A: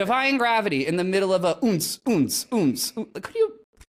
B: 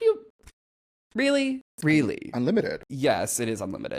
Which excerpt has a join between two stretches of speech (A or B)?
B